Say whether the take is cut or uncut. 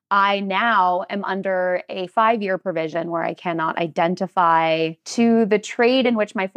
cut